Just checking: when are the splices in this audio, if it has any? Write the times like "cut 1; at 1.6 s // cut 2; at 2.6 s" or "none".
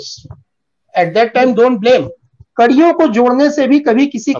cut 1; at 2.4 s